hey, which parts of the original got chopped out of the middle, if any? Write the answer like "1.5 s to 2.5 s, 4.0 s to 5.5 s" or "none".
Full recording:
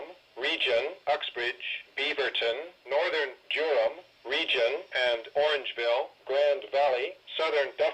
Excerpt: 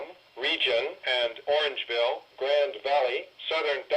0.9 s to 4.8 s